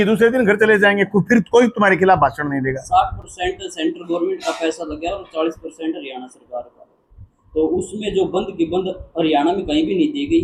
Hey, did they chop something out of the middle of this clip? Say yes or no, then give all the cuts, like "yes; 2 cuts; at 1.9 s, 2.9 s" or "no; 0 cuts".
no; 0 cuts